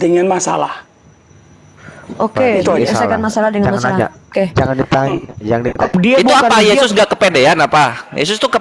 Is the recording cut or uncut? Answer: cut